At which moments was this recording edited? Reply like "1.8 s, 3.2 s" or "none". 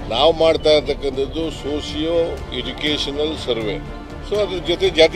none